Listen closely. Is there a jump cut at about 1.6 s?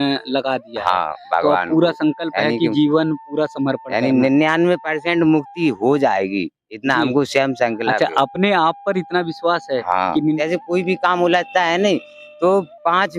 no; 1 cut; at 10.4 s

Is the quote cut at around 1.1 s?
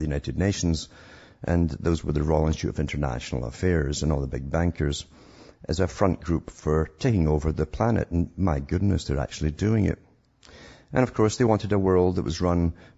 no; 1 cut; at 7.4 s

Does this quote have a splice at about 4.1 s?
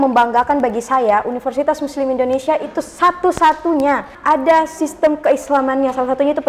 yes; 1 cut; at 4.1 s

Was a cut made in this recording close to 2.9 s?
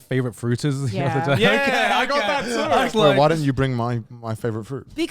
yes; 1 cut; at 2.9 s

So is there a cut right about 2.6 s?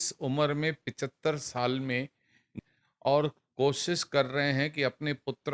yes; 1 cut; at 2.6 s

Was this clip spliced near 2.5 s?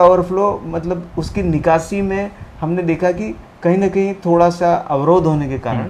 no; 0 cuts

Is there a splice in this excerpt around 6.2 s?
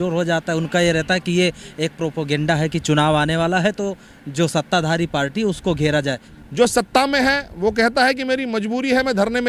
yes; 1 cut; at 6.2 s

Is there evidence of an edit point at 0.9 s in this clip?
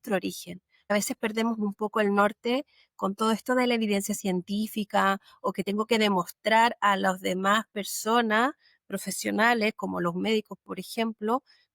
yes; 1 cut; at 0.9 s

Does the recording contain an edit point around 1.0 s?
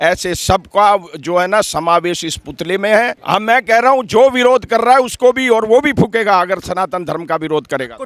no; 1 cut; at 3.2 s

